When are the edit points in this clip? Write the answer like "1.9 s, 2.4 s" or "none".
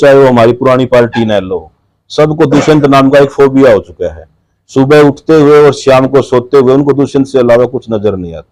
none